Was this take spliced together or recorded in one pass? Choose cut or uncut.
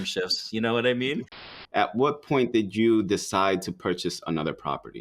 cut